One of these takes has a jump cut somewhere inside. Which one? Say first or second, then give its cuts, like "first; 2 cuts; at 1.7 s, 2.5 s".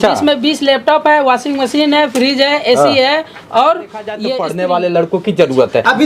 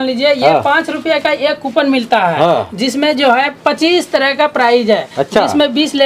first; 1 cut; at 4.2 s